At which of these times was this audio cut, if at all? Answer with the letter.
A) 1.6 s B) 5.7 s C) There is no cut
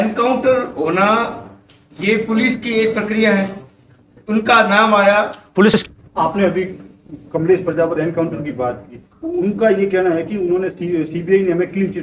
B